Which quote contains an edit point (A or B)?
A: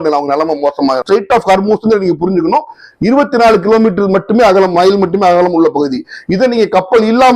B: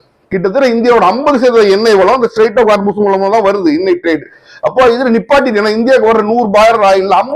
A